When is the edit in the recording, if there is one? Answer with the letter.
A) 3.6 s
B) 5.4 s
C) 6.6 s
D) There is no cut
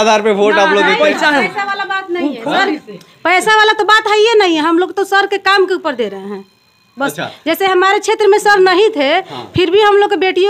D